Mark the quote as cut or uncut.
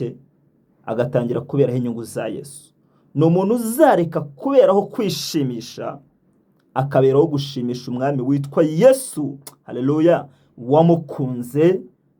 uncut